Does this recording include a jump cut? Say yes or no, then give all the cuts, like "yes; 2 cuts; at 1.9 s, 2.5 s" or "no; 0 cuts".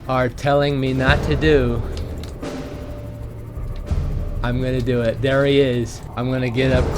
yes; 1 cut; at 6.0 s